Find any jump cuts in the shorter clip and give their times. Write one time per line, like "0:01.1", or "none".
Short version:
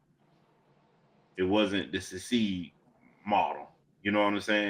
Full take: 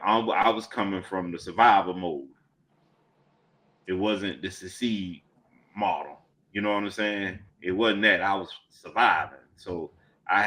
none